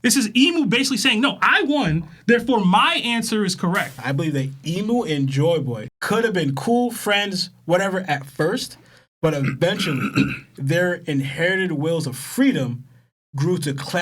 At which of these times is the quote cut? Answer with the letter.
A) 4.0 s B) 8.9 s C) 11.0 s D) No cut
A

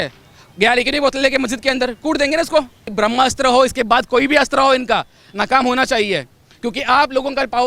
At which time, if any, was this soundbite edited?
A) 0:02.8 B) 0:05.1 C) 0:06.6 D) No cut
A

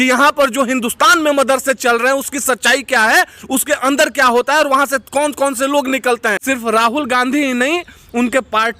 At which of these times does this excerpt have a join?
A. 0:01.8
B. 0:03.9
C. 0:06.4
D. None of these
C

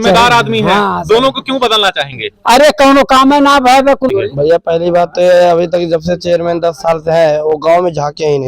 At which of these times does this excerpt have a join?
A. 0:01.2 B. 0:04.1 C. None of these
B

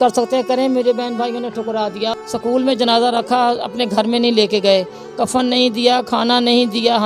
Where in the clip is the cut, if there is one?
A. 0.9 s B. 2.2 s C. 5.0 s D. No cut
B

